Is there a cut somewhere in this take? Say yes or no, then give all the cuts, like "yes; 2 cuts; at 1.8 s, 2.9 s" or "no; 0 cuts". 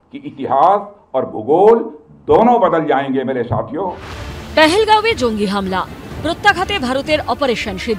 yes; 1 cut; at 3.8 s